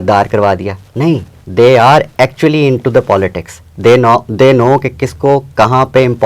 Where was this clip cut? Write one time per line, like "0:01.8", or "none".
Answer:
0:01.4